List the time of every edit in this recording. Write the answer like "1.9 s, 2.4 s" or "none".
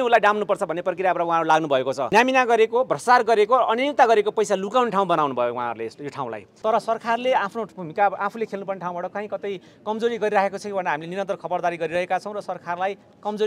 2.1 s, 6.4 s